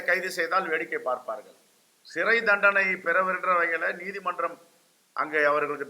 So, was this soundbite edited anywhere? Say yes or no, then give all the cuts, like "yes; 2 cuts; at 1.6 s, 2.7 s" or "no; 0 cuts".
no; 0 cuts